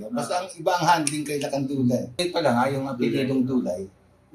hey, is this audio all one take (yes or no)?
no